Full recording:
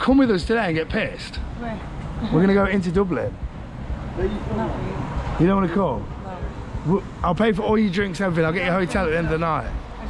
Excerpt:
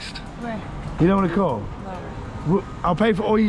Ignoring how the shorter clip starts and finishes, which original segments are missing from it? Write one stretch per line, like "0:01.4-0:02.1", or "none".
0:02.1-0:05.3